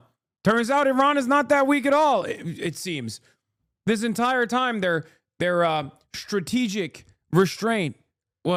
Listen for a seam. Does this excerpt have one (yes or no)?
no